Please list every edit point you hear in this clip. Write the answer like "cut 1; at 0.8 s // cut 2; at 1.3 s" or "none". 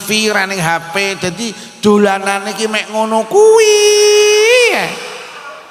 none